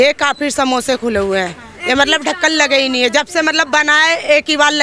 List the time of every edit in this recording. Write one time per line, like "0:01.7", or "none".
none